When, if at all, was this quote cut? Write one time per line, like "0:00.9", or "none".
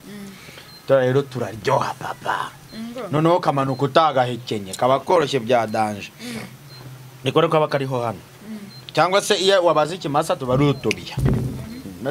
none